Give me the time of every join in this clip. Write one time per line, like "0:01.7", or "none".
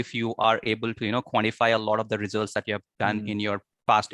none

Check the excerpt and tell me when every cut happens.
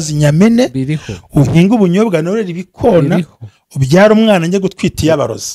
none

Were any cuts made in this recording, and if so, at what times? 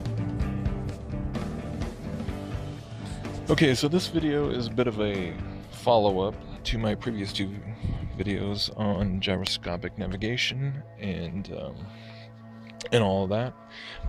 0:03.8

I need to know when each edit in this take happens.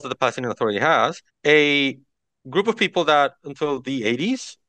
0:01.3

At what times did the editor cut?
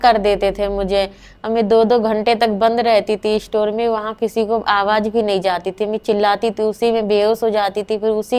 none

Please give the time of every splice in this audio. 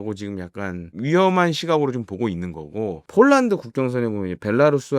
0:00.9
0:03.0

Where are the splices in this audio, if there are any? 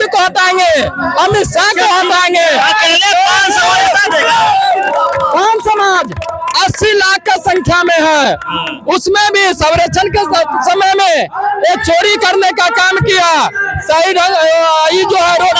none

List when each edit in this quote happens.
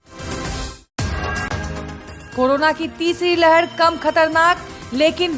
0:02.1

